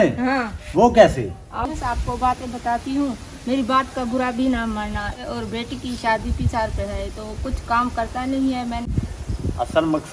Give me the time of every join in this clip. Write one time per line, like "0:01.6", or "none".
0:01.7
0:05.2
0:08.9